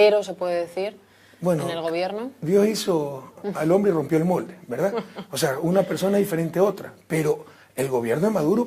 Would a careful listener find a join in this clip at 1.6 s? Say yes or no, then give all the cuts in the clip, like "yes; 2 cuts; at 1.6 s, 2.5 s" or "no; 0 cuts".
yes; 1 cut; at 1.6 s